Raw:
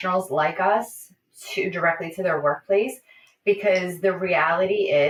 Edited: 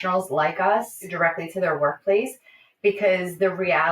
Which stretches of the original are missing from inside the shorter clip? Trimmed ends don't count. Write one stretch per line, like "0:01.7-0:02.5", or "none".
0:01.1-0:01.7